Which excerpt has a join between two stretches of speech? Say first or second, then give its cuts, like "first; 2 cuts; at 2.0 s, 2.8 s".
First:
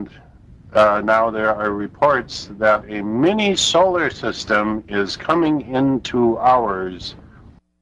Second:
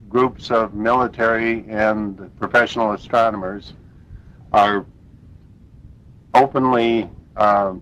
second; 1 cut; at 1.9 s